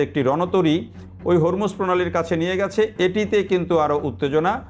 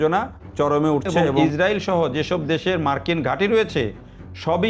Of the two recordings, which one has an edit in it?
second; 1 cut; at 1.4 s

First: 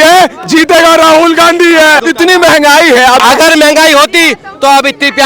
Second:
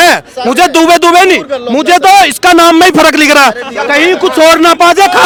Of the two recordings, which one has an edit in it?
first; 2 cuts; at 2.0 s, 3.2 s

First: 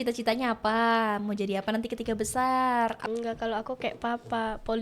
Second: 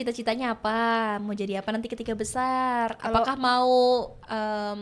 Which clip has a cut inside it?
first; 1 cut; at 3.0 s

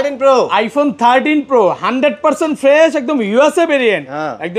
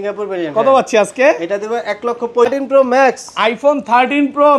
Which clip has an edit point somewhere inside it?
second; 1 cut; at 2.5 s

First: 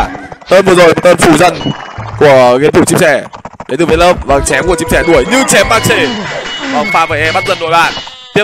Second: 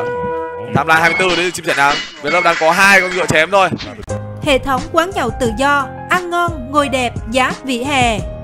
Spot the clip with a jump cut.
second; 1 cut; at 4.3 s

